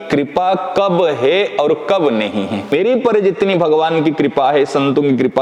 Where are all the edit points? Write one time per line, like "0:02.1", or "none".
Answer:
0:02.7